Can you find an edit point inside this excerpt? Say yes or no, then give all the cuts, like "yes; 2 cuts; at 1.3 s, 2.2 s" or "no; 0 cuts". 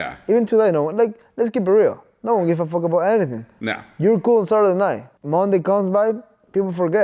yes; 1 cut; at 5.1 s